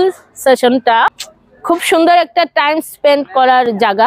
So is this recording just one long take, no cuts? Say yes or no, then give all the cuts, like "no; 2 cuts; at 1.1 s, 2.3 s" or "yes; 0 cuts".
no; 1 cut; at 1.2 s